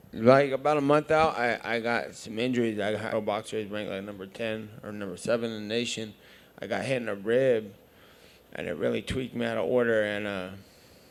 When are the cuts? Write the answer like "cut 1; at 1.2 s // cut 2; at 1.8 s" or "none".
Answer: none